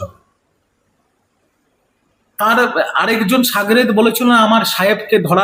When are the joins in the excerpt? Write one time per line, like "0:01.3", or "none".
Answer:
none